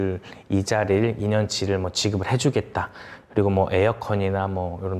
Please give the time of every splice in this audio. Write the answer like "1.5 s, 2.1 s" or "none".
none